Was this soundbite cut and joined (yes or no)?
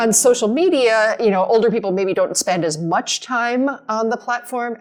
no